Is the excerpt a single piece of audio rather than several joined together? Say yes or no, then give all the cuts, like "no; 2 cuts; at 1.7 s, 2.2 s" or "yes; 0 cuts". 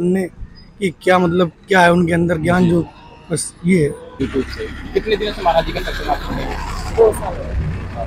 no; 1 cut; at 4.1 s